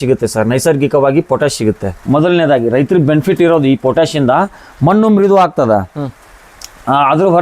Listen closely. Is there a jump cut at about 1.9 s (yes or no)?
yes